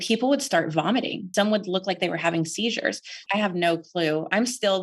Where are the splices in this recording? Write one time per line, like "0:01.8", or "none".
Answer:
0:01.2
0:03.2

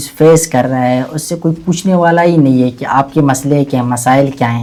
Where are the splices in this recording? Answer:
none

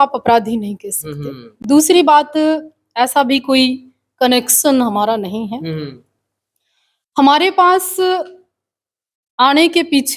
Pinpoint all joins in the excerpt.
none

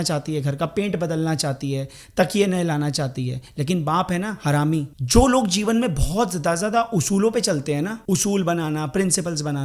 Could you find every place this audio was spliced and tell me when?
0:04.9
0:08.0

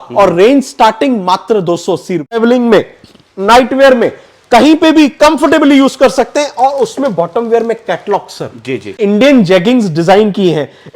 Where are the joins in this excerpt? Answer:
0:02.4
0:09.0

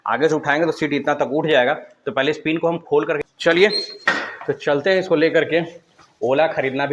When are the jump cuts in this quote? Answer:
0:03.2

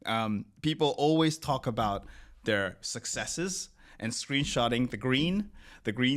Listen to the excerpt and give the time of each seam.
none

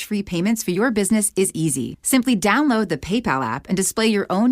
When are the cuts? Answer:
0:01.9

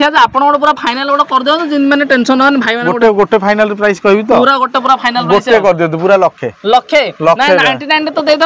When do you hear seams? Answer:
none

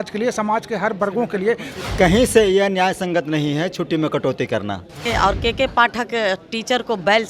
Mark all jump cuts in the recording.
0:01.8
0:05.1

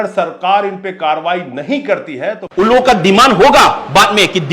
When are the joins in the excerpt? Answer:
0:02.4

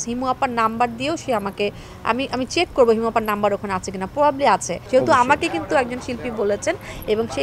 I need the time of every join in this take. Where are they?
0:04.8

